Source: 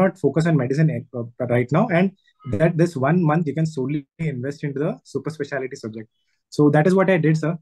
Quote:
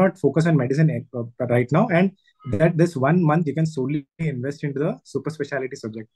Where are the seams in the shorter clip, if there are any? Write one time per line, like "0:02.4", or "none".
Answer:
none